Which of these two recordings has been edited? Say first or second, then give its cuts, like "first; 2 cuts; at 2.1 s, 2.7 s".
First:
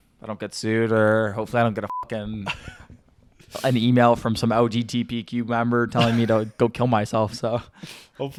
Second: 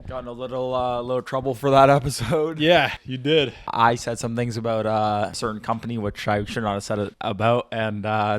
second; 3 cuts; at 3.4 s, 5.3 s, 7.2 s